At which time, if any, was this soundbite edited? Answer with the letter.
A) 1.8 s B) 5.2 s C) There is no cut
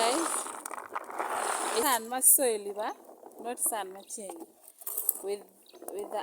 A